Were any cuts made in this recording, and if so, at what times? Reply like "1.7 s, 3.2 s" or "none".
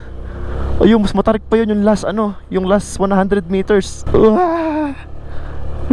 4.1 s